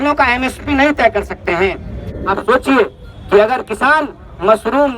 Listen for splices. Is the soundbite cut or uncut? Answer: cut